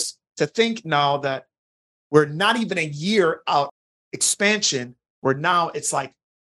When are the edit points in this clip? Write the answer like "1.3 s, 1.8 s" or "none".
3.7 s